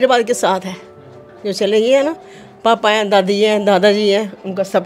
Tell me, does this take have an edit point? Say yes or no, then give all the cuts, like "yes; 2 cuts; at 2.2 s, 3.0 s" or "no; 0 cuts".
no; 0 cuts